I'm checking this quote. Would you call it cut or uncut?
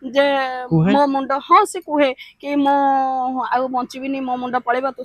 uncut